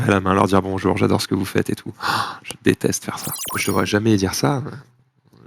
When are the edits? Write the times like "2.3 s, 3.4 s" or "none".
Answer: 3.5 s